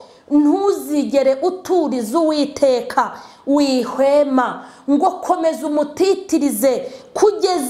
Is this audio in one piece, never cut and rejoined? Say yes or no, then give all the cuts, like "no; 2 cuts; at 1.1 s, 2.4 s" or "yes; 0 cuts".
yes; 0 cuts